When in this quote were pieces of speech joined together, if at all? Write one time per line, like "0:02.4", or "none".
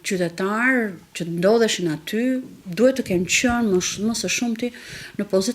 0:02.6